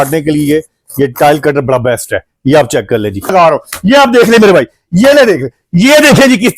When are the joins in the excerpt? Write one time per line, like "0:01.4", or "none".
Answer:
0:03.3